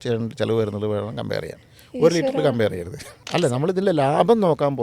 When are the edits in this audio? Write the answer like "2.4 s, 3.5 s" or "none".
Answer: 3.2 s